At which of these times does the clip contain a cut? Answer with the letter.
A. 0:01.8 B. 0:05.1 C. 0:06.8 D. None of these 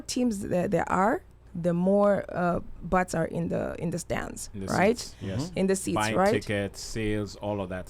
D